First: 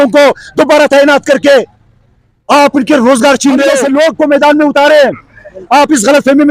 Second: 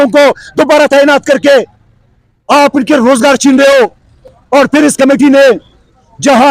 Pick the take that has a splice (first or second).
first